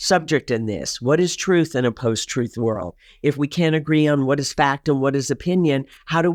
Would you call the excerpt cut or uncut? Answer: uncut